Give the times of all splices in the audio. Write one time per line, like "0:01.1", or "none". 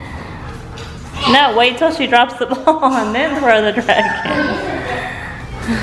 none